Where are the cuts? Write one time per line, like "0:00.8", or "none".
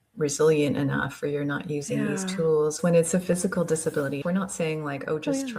0:02.8
0:04.2